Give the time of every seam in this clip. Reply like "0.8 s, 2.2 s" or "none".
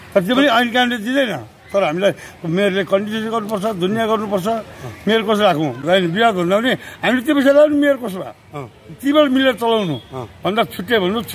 5.8 s